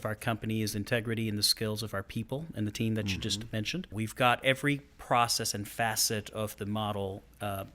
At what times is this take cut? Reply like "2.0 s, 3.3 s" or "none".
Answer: 3.9 s